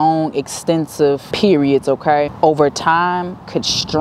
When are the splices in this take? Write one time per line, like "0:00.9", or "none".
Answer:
0:01.3
0:02.3